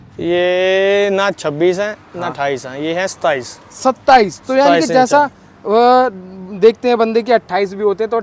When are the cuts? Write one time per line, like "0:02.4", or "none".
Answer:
none